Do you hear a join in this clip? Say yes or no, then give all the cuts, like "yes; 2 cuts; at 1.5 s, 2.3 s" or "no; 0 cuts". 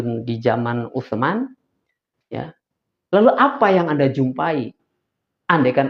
no; 0 cuts